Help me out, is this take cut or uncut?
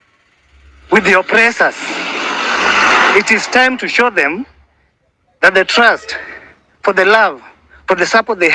uncut